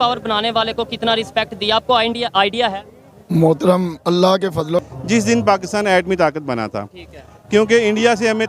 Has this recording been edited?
yes; 1 cut; at 4.9 s

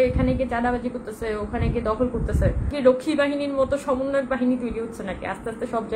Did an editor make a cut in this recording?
yes; 1 cut; at 2.7 s

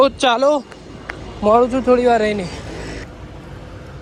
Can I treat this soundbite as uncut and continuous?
yes; 0 cuts

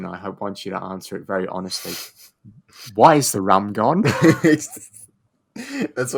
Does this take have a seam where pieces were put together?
no; 0 cuts

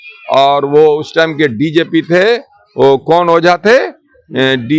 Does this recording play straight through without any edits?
yes; 0 cuts

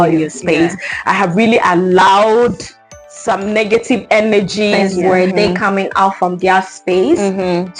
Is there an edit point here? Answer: yes; 1 cut; at 4.8 s

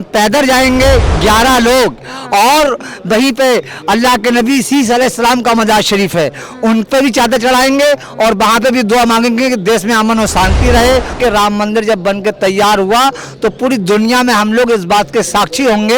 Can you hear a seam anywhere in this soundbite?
yes; 1 cut; at 11.1 s

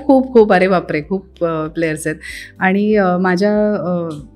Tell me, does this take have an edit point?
no; 0 cuts

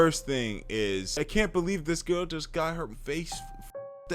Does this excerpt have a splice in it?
yes; 2 cuts; at 1.2 s, 2.9 s

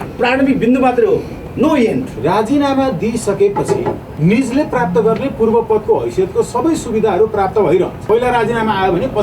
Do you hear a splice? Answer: yes; 3 cuts; at 2.1 s, 4.1 s, 8.0 s

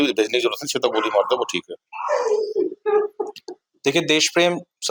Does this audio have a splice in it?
no; 0 cuts

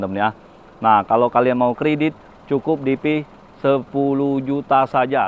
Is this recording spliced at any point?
no; 0 cuts

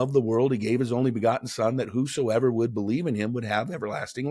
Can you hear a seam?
no; 0 cuts

